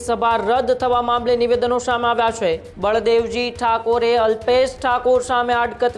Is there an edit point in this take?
yes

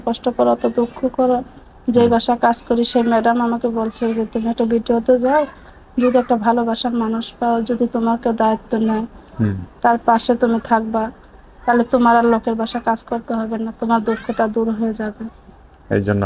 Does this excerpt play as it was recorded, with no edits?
yes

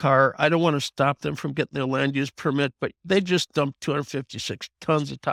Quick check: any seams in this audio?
no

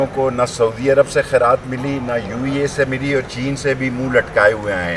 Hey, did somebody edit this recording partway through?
no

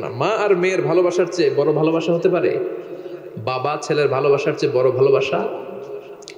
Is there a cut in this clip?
no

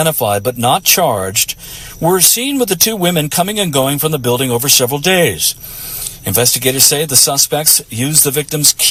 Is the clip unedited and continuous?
yes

